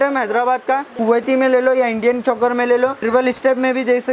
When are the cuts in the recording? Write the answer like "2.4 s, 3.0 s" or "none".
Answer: 0.9 s, 3.0 s